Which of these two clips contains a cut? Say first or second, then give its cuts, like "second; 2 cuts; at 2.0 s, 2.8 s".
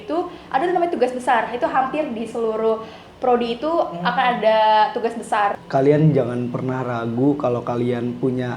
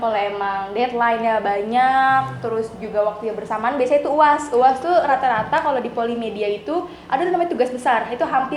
first; 1 cut; at 5.6 s